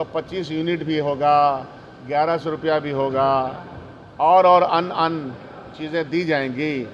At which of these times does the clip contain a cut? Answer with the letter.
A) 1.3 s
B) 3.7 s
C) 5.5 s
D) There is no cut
D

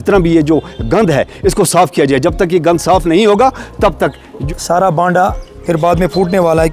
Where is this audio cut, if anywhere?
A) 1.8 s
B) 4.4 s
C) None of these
B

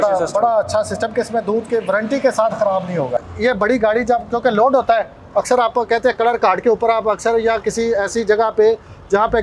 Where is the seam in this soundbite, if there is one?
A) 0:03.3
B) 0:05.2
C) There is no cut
A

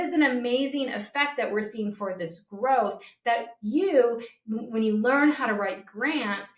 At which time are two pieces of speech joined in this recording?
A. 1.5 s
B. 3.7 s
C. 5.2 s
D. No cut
D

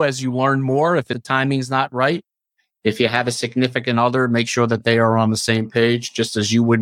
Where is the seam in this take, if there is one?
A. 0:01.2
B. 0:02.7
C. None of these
A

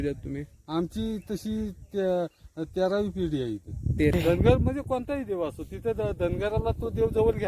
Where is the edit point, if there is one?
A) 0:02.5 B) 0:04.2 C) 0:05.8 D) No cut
B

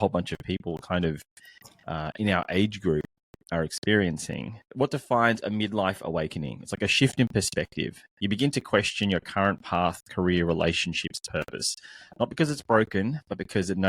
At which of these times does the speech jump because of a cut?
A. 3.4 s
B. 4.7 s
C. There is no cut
B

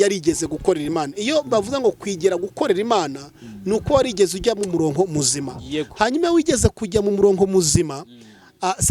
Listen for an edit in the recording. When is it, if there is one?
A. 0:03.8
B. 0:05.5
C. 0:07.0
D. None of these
D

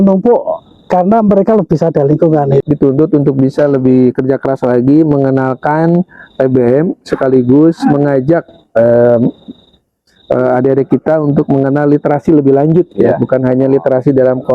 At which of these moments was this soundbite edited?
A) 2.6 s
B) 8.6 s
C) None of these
A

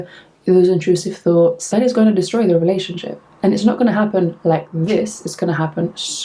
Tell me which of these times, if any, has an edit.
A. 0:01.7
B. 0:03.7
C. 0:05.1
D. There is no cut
A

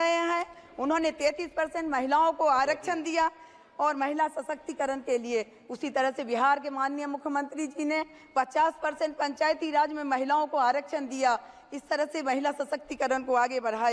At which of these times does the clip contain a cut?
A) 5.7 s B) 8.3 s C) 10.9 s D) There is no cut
D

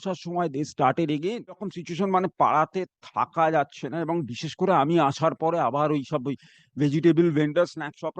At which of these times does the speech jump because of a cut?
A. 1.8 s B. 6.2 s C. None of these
A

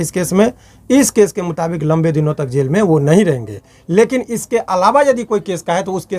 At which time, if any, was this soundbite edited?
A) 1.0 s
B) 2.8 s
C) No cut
C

